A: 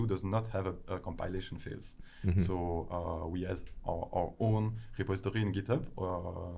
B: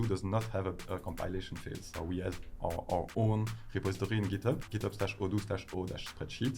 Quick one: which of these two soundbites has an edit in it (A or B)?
B